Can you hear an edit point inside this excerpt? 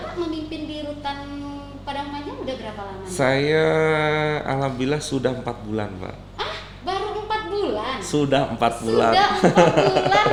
no; 0 cuts

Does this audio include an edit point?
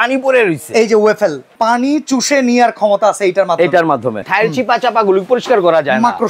yes; 2 cuts; at 1.4 s, 4.2 s

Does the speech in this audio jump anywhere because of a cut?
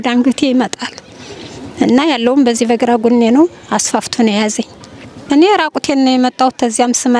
yes; 1 cut; at 5.2 s

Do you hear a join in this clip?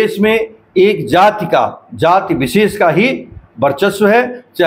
no; 0 cuts

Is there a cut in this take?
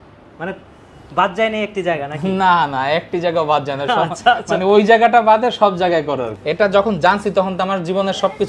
yes; 1 cut; at 6.3 s

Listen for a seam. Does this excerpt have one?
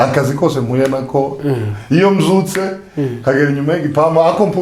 no; 0 cuts

